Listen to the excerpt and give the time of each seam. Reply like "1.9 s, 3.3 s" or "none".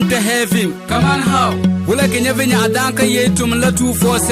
none